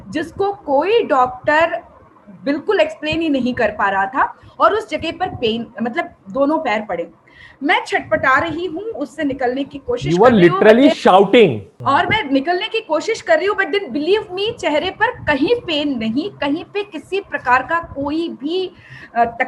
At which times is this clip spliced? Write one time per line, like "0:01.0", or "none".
none